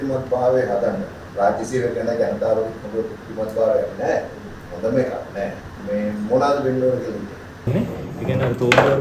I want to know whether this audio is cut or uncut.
cut